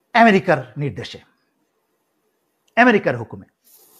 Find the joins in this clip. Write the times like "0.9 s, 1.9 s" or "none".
none